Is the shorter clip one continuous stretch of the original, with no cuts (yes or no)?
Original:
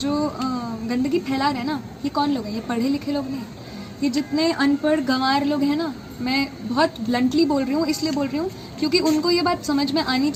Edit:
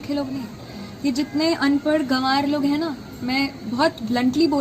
yes